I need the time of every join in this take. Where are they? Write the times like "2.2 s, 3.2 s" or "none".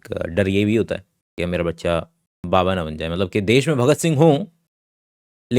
none